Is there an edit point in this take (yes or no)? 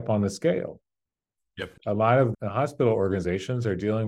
yes